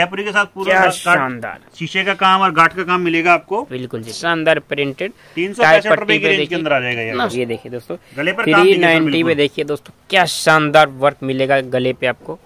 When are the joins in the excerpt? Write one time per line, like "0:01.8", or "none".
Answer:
0:04.1
0:07.3